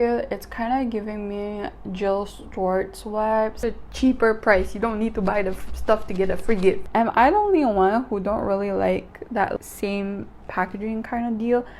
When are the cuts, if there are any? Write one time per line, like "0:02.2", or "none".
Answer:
0:03.6
0:06.8